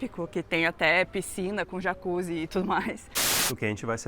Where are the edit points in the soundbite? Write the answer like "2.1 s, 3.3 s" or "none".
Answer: 3.1 s

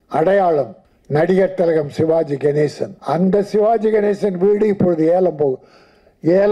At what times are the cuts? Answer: 2.9 s

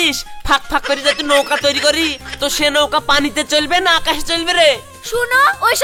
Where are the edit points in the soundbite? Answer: none

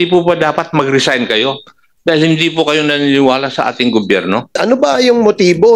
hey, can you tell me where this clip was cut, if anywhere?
4.6 s

